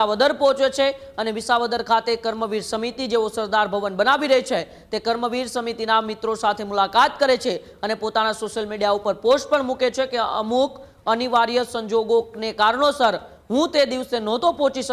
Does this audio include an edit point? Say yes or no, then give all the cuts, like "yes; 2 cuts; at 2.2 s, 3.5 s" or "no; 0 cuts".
no; 0 cuts